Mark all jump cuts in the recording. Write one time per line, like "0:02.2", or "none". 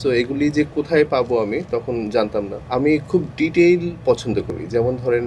0:02.6